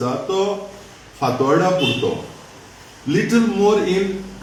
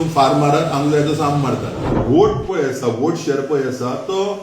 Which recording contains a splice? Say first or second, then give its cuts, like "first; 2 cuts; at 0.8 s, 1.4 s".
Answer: second; 1 cut; at 2.0 s